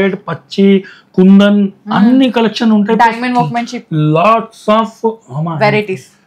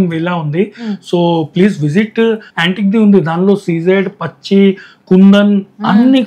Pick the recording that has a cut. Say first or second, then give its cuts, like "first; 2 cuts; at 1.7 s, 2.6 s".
second; 1 cut; at 2.5 s